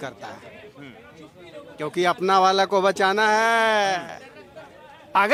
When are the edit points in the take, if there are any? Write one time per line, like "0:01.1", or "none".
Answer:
none